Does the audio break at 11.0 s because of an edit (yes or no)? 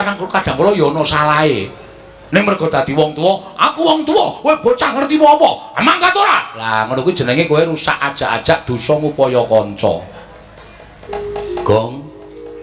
yes